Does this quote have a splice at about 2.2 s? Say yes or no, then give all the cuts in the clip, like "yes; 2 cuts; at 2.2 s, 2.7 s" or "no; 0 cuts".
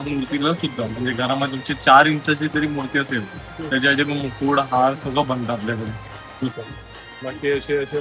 no; 1 cut; at 6.5 s